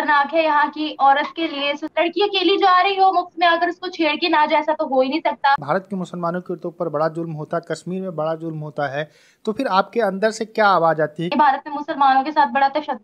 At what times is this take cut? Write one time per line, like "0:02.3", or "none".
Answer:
0:01.8
0:05.6
0:11.3